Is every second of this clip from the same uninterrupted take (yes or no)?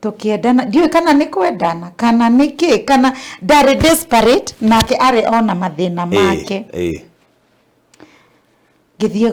yes